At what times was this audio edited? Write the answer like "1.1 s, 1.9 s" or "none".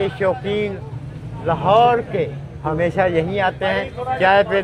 none

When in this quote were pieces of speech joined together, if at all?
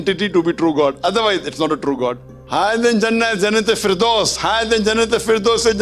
2.3 s

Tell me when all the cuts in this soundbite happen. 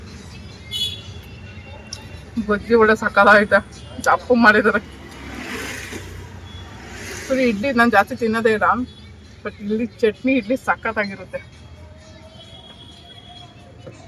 none

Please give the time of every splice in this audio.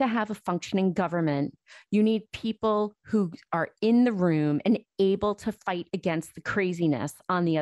none

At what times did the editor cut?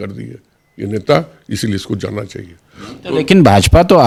none

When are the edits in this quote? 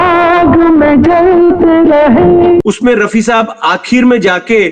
2.6 s

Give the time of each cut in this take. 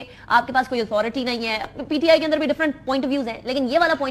none

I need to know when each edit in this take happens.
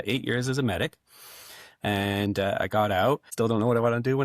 3.3 s

